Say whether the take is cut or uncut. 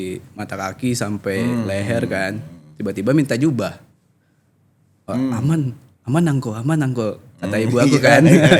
uncut